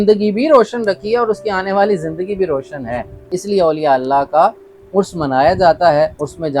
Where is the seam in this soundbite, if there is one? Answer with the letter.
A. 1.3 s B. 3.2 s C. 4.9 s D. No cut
B